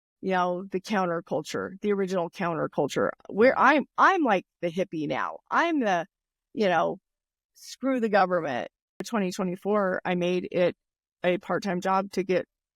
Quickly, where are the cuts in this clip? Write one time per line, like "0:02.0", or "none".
0:09.1